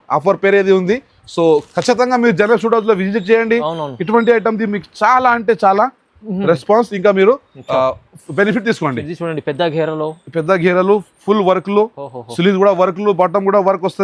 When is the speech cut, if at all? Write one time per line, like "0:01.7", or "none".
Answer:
none